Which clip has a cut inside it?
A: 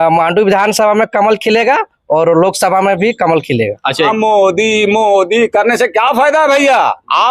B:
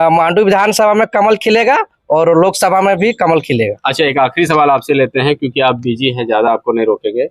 A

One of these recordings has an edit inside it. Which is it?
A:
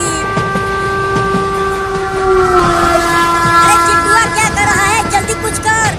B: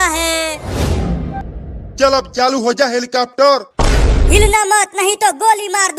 B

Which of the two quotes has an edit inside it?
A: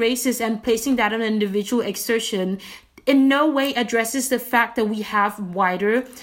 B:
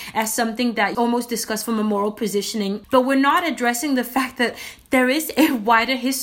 B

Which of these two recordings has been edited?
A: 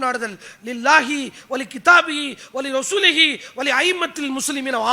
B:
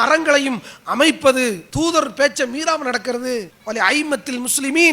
B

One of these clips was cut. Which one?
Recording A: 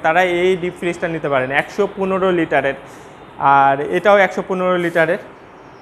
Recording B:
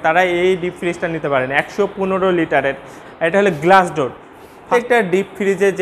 B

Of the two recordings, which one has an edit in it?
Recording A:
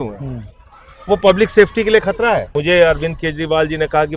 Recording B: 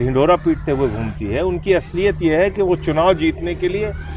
A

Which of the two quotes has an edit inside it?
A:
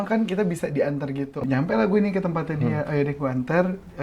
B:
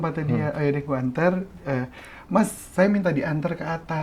A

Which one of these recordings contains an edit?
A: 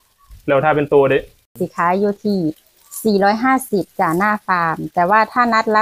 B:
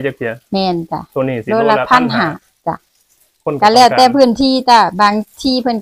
A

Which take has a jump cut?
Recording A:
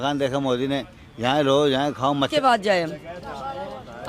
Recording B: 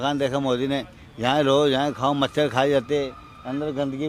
A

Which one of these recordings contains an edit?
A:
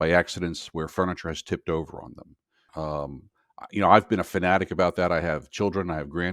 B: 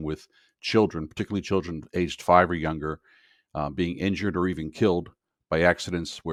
A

